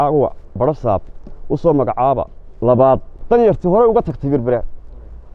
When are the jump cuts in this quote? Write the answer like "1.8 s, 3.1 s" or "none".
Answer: 3.1 s